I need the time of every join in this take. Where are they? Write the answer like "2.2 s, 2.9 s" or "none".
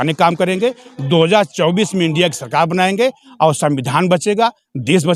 none